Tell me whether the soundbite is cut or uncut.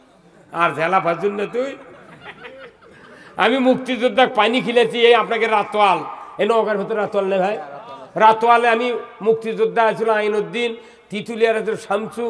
uncut